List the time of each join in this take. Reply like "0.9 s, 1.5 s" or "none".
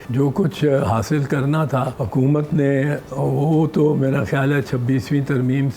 2.0 s